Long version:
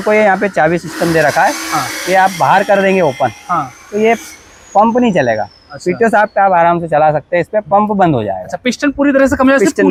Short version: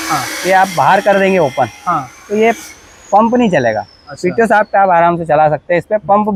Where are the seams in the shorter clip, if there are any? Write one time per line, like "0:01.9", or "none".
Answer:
none